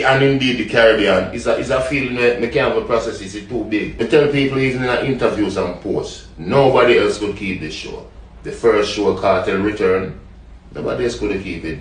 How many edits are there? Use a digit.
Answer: 1